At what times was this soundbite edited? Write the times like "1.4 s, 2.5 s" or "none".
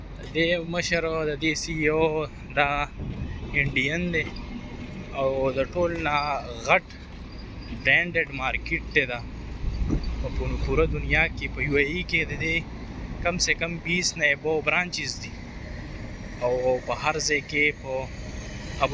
none